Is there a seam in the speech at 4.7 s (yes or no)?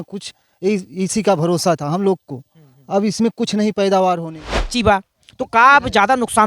yes